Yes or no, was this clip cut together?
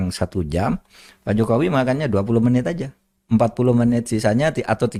no